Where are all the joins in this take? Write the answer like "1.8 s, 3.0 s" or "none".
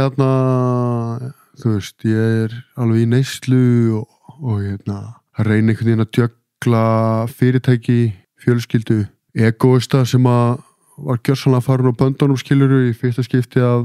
5.2 s, 8.3 s, 9.2 s